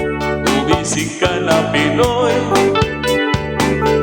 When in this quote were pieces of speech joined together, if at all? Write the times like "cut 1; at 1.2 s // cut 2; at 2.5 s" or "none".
none